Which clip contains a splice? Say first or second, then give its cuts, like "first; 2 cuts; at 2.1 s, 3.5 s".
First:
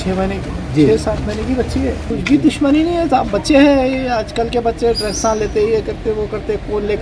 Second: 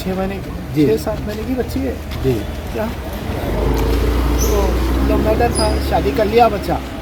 first; 1 cut; at 2.1 s